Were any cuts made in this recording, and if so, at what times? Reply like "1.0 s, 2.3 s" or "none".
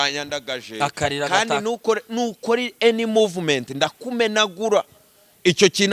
none